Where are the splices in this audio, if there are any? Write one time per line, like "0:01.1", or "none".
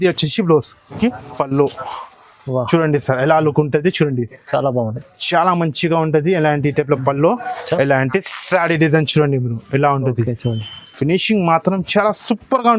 0:01.0